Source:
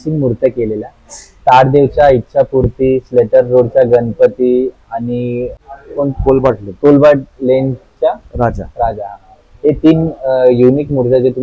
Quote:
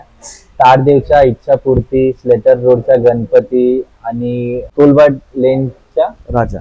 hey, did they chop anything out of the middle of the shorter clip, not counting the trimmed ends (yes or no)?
yes